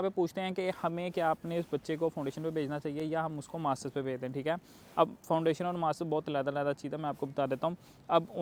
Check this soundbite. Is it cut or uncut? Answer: uncut